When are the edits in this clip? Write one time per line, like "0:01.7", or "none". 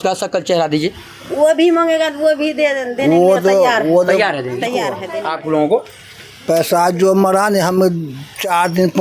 0:05.0